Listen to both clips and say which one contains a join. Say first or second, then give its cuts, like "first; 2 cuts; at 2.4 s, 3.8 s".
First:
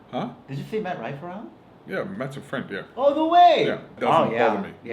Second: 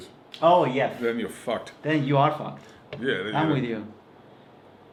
first; 1 cut; at 4.0 s